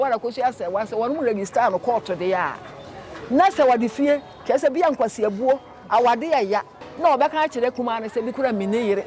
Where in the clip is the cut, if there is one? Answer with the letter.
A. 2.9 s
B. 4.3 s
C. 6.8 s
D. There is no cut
C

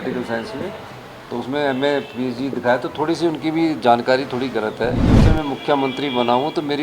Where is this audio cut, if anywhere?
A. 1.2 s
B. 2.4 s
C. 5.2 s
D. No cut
C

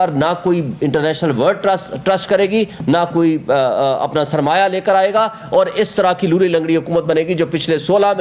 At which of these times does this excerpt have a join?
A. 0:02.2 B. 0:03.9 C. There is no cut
C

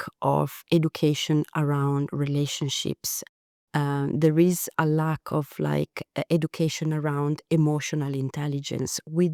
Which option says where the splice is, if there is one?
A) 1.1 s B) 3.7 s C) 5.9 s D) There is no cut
D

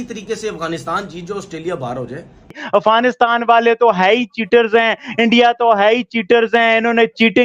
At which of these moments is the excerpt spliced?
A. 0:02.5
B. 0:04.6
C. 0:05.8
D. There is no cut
A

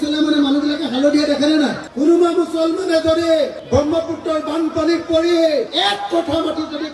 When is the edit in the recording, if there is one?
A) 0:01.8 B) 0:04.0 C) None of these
A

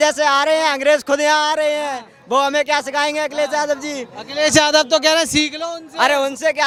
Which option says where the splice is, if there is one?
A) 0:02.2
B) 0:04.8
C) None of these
C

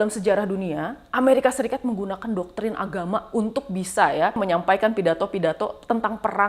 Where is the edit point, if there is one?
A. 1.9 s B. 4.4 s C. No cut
B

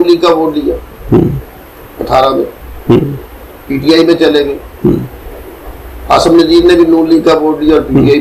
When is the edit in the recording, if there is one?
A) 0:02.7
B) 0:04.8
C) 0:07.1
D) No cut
D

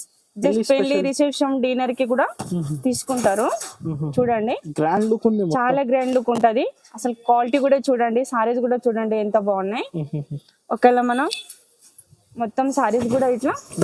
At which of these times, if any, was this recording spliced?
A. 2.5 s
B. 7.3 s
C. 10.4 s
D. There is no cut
D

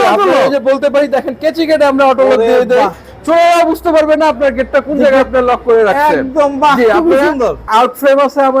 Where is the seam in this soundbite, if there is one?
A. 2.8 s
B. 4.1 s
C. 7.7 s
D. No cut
C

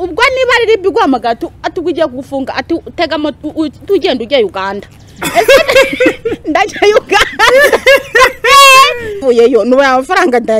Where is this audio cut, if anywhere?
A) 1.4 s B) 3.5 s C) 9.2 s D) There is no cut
C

